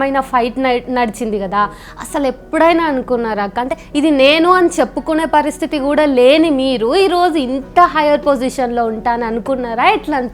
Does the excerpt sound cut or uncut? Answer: uncut